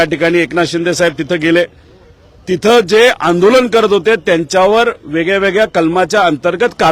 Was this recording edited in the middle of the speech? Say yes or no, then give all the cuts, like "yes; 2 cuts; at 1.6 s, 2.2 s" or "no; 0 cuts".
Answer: no; 0 cuts